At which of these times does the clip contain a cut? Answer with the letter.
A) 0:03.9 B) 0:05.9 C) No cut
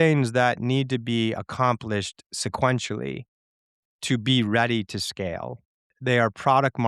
B